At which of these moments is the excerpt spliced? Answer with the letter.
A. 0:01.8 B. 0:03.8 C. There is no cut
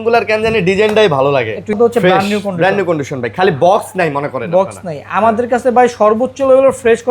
A